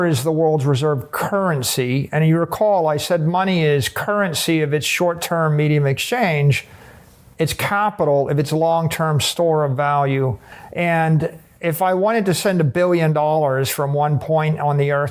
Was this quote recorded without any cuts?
yes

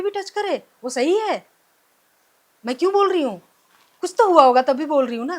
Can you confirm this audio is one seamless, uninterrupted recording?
yes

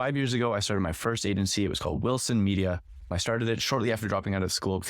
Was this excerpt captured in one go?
no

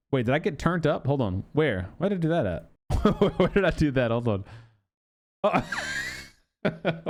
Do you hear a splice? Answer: no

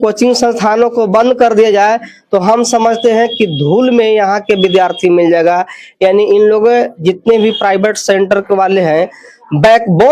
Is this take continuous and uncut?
yes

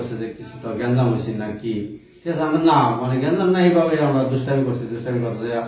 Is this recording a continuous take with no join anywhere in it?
yes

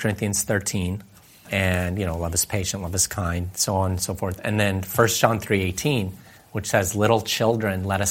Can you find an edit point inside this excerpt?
yes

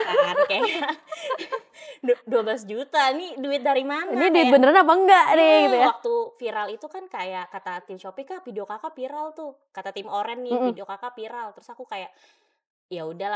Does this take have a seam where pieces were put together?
no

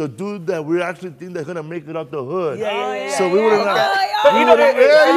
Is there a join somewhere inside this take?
no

